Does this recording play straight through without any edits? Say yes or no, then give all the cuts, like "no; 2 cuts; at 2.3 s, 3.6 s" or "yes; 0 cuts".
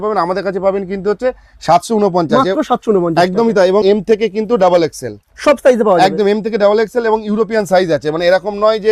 yes; 0 cuts